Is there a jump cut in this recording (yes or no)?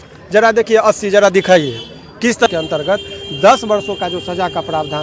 yes